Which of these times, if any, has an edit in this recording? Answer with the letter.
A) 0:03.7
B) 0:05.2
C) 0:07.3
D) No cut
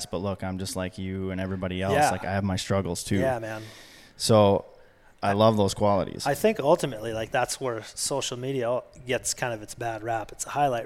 C